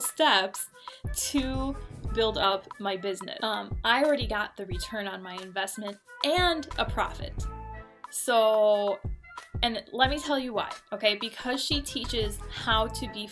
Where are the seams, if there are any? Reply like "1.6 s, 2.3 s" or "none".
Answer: 3.4 s